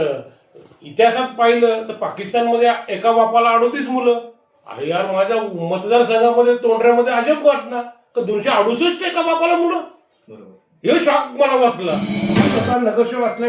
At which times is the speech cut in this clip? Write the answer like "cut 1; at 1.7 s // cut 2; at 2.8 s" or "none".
cut 1; at 12.2 s

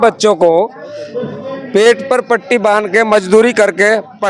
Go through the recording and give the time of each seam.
none

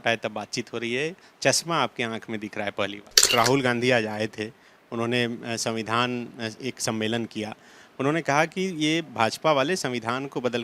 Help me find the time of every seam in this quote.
cut 1; at 3.3 s

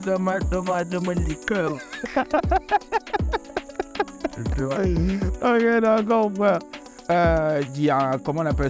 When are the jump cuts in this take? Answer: none

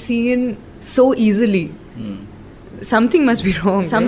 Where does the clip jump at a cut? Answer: none

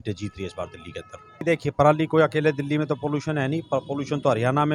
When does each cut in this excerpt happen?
cut 1; at 1.4 s

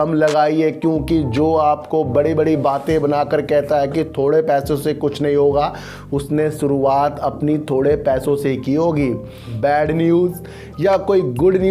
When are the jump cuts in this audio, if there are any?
cut 1; at 9.5 s

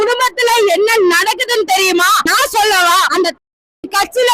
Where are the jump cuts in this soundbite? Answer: cut 1; at 3.1 s

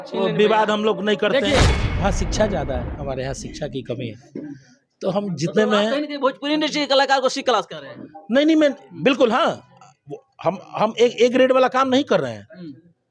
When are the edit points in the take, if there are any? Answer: cut 1; at 1.8 s

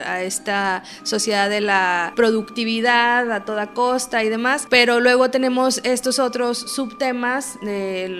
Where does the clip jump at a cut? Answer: cut 1; at 2.1 s // cut 2; at 4.6 s

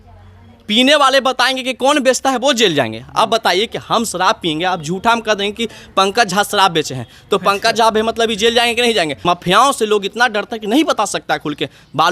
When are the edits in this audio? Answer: cut 1; at 9.1 s

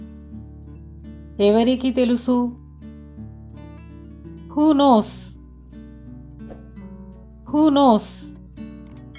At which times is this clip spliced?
cut 1; at 0.7 s // cut 2; at 5.0 s // cut 3; at 7.1 s // cut 4; at 8.2 s

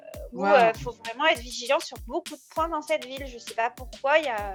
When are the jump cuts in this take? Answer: none

